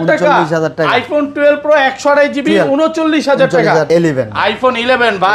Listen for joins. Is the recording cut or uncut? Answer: cut